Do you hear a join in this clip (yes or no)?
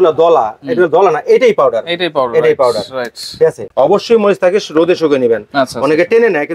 yes